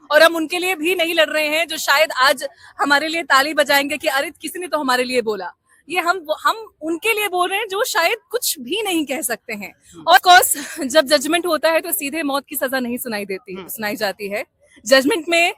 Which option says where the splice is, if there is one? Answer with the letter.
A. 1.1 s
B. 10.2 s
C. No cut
B